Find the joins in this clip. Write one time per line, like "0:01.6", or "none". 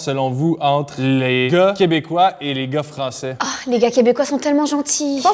0:01.5
0:03.3